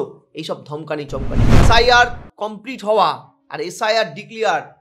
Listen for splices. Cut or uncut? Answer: cut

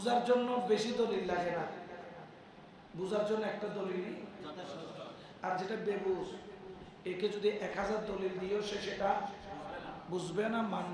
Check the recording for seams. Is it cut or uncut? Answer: uncut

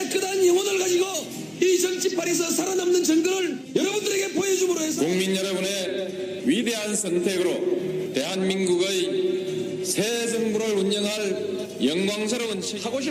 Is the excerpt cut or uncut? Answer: uncut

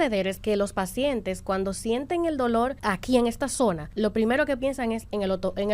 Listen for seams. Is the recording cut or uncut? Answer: cut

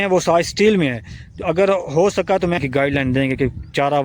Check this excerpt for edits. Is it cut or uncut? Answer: cut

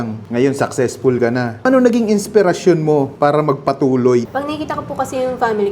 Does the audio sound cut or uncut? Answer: cut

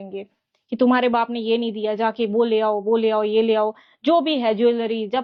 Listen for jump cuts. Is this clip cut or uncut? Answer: uncut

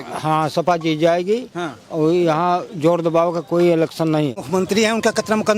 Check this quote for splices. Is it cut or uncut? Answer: cut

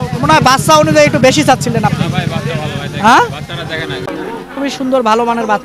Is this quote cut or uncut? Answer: cut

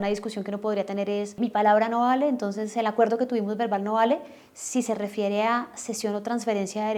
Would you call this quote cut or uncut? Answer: uncut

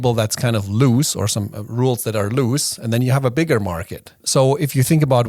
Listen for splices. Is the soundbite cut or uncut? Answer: cut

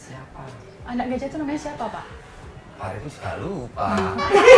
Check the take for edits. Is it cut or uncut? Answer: uncut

